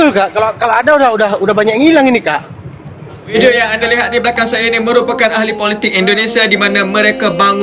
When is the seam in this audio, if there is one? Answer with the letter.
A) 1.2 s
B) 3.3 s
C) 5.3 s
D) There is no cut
B